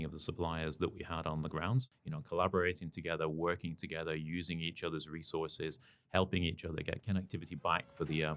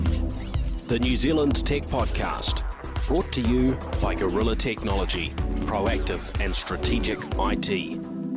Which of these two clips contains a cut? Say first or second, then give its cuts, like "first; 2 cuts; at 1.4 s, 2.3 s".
first; 2 cuts; at 1.8 s, 7.0 s